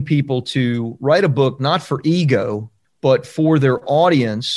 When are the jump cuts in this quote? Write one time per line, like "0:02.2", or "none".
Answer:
none